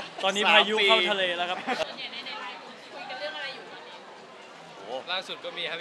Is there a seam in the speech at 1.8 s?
yes; 1 cut; at 1.8 s

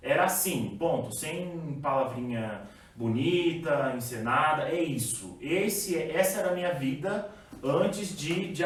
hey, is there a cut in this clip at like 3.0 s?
no; 0 cuts

